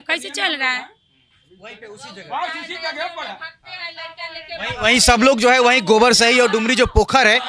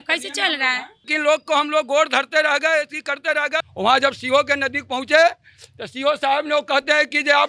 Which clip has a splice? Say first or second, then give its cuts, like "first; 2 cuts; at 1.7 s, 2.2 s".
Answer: second; 2 cuts; at 1.1 s, 3.7 s